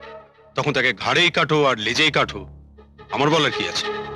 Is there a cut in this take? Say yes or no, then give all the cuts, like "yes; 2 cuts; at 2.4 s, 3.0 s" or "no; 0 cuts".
no; 0 cuts